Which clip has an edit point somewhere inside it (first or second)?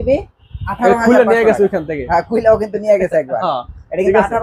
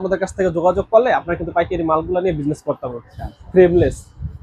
second